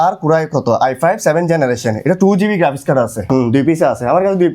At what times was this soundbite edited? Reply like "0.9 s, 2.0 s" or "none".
3.3 s